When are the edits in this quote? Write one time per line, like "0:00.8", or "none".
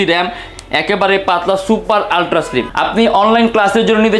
0:02.6